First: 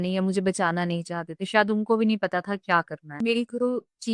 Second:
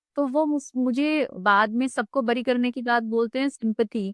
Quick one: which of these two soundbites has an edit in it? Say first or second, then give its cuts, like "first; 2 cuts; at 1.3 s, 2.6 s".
first; 1 cut; at 3.0 s